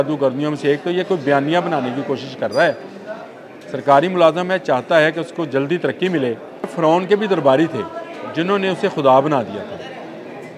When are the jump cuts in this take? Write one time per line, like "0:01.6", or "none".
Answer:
0:06.7